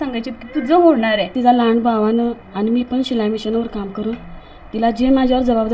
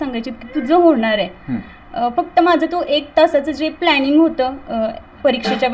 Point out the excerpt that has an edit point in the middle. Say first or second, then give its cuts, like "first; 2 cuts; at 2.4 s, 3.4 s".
first; 1 cut; at 1.3 s